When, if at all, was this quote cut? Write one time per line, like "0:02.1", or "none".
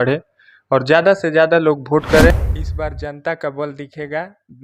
0:02.3

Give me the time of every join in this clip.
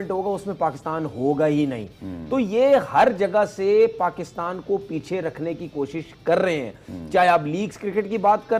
none

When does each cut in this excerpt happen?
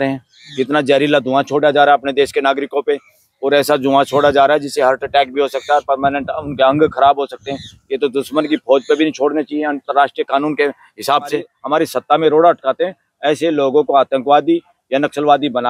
0:11.5

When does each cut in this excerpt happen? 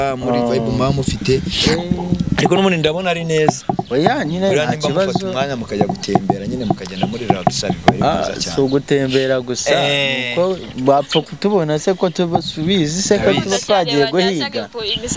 none

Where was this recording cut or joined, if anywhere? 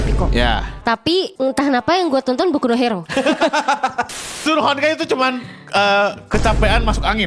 0:01.3
0:03.0
0:04.3

